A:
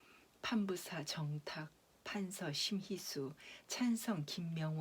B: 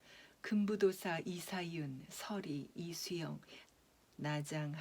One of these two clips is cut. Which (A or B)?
B